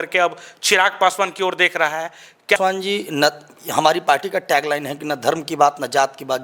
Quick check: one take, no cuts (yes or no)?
no